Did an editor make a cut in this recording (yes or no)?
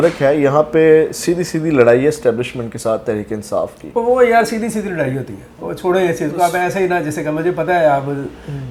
no